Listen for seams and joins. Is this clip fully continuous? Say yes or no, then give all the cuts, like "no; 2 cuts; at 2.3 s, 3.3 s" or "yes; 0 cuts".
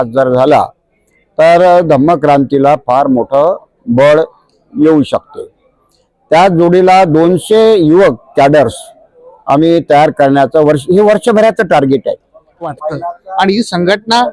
no; 1 cut; at 12.7 s